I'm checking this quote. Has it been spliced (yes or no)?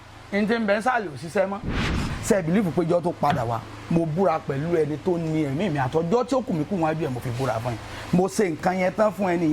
yes